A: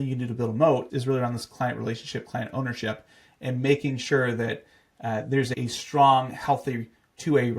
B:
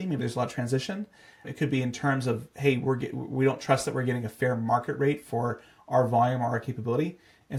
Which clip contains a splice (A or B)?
A